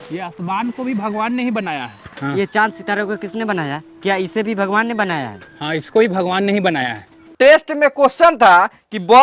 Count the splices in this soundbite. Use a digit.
1